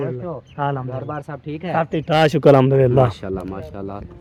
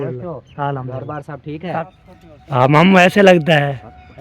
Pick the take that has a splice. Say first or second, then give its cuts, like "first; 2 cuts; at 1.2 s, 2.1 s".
second; 1 cut; at 1.8 s